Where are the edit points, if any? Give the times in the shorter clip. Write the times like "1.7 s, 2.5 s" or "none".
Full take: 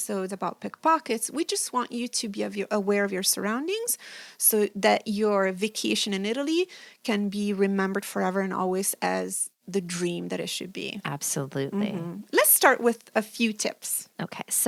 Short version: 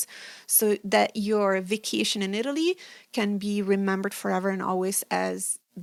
none